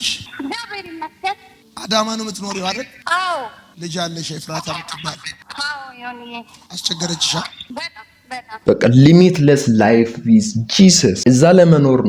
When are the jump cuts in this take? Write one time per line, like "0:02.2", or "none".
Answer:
0:08.5